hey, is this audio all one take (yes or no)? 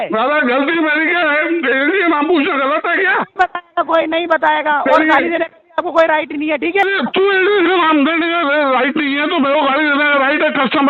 no